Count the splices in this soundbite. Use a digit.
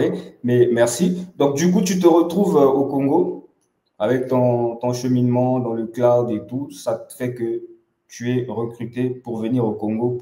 0